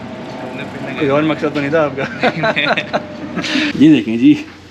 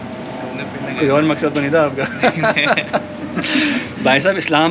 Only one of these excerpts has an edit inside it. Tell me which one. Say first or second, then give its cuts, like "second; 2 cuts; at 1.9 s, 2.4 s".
first; 1 cut; at 3.7 s